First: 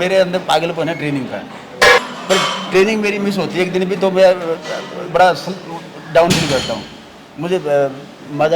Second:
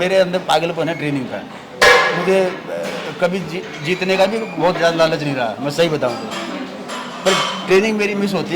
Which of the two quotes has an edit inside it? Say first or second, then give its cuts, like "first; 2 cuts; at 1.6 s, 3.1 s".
first; 1 cut; at 2.0 s